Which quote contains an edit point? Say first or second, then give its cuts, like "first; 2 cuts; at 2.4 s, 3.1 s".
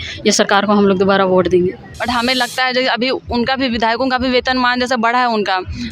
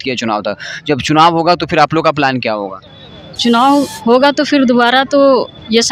first; 1 cut; at 1.9 s